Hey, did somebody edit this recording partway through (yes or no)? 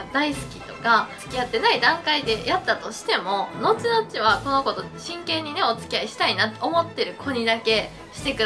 yes